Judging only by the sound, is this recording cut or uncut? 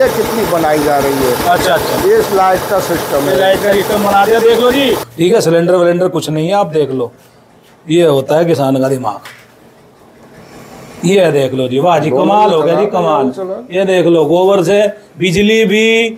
cut